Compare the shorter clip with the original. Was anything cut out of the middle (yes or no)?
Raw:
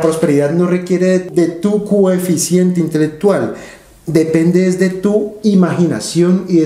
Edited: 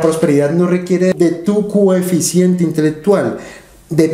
yes